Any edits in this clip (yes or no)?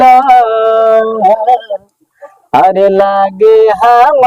no